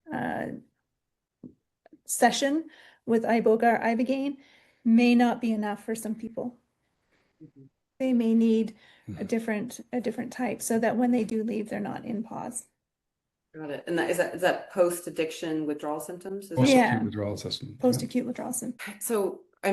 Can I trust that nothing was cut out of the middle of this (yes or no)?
no